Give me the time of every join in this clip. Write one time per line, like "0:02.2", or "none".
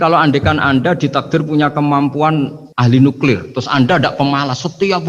0:02.6